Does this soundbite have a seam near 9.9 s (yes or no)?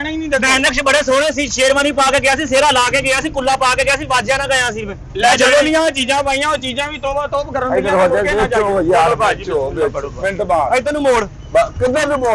no